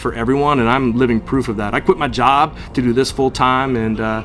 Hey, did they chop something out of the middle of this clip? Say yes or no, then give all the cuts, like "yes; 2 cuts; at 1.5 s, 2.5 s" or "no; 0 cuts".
no; 0 cuts